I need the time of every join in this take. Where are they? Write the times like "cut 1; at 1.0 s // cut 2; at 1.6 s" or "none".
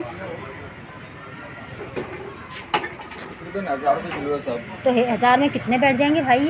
none